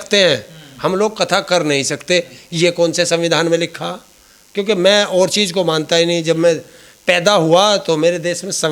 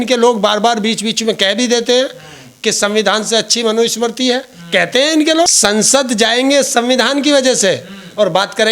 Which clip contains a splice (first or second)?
second